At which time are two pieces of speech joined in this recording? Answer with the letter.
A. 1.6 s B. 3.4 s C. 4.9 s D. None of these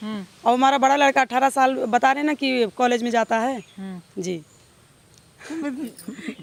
D